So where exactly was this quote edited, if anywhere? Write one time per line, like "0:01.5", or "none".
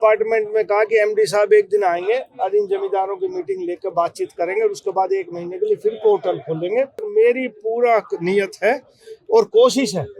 0:07.0